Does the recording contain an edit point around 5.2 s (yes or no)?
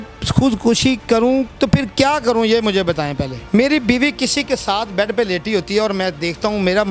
no